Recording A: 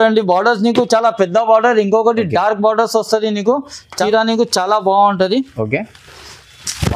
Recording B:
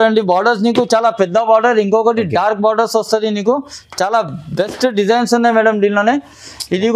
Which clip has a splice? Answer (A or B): A